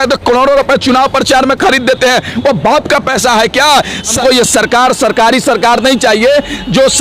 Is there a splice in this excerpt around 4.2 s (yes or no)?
yes